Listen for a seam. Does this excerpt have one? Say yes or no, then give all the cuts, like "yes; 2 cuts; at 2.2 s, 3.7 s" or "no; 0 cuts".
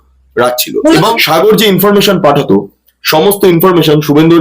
yes; 1 cut; at 1.2 s